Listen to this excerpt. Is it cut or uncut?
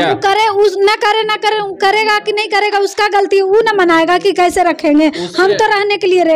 uncut